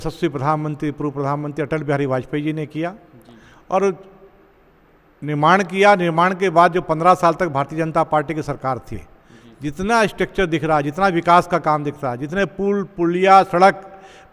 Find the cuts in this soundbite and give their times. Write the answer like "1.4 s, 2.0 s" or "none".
none

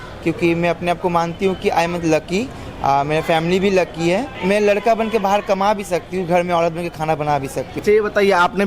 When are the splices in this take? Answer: 4.3 s, 7.7 s

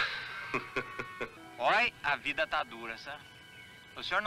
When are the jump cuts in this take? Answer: 1.4 s

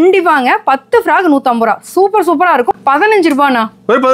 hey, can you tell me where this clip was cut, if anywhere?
2.7 s

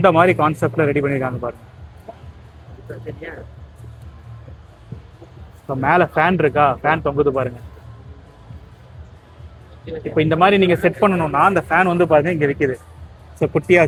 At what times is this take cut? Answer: none

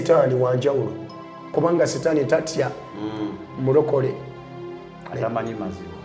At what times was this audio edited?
1.4 s

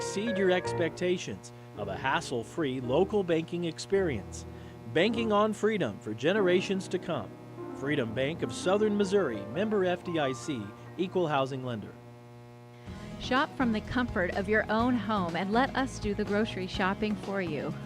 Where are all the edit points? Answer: 12.3 s

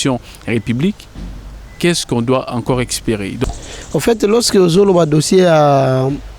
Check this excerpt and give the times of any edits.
3.4 s

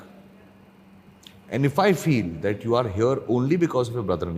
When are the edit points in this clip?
none

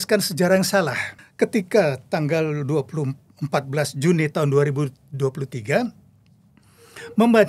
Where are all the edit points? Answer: 1.2 s

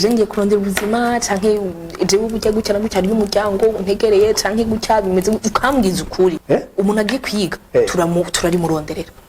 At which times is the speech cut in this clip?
6.4 s

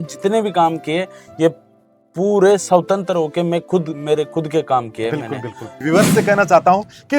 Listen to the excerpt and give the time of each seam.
5.7 s

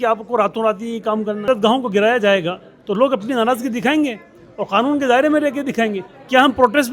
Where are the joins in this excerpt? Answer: 1.5 s

